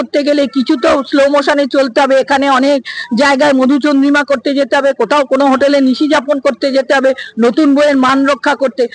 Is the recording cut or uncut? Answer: uncut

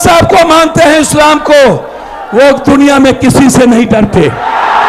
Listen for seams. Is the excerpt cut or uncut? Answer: uncut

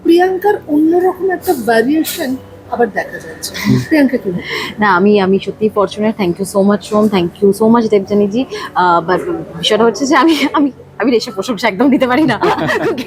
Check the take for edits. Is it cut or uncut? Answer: uncut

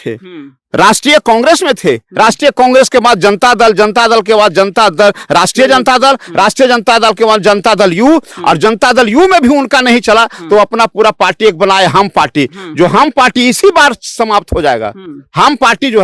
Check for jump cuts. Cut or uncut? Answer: uncut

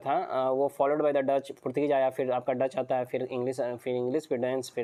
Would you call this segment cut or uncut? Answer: uncut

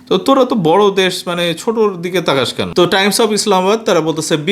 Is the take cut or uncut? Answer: cut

